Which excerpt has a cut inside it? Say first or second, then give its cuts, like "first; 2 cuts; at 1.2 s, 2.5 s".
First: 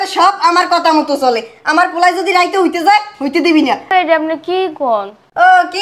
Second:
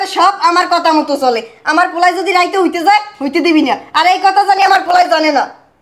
first; 1 cut; at 3.9 s